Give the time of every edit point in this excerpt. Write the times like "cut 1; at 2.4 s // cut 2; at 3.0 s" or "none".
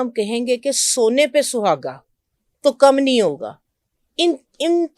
none